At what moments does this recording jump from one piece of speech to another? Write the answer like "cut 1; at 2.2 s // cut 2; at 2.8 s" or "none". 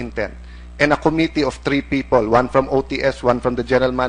cut 1; at 1.0 s